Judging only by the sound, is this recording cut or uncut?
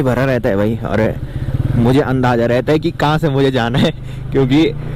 uncut